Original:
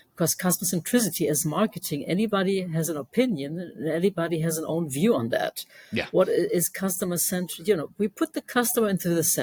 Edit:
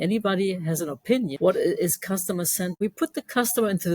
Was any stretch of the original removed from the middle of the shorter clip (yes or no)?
yes